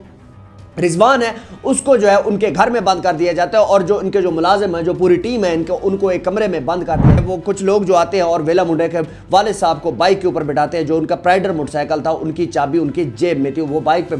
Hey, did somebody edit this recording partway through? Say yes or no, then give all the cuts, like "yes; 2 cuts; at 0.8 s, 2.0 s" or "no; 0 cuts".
yes; 1 cut; at 7.2 s